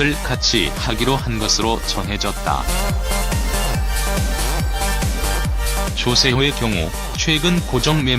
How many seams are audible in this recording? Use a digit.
1